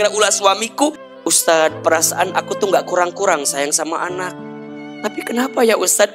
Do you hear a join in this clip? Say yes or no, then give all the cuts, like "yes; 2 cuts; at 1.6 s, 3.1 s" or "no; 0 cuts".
yes; 2 cuts; at 1.0 s, 4.8 s